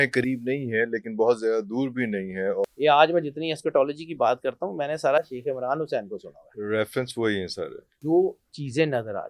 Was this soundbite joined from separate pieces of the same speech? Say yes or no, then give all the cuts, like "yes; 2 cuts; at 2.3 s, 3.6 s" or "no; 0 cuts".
yes; 2 cuts; at 2.6 s, 8.0 s